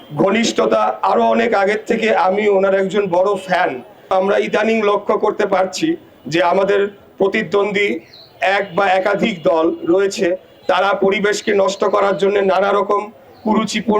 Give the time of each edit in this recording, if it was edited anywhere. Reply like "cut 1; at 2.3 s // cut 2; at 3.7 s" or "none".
cut 1; at 4.1 s